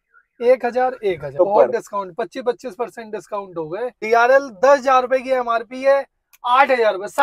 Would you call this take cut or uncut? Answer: cut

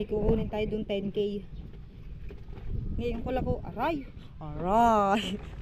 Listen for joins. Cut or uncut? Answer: uncut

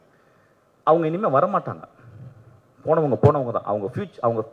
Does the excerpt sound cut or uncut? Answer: uncut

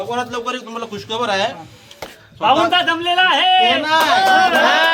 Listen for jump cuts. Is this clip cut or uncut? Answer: uncut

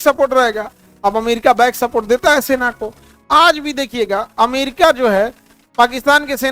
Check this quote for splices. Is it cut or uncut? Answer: uncut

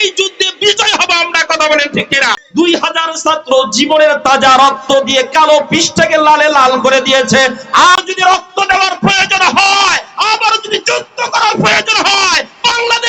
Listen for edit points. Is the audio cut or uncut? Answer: cut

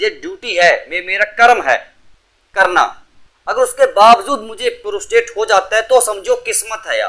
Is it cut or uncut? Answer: uncut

